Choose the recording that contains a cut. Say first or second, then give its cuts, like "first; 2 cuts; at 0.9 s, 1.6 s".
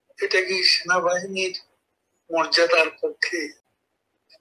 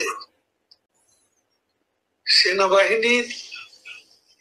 second; 1 cut; at 3.2 s